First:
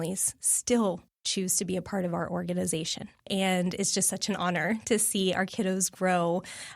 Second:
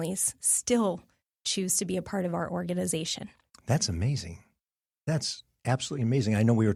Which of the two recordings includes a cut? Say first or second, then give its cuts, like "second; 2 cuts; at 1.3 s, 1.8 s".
first; 2 cuts; at 1.1 s, 3.3 s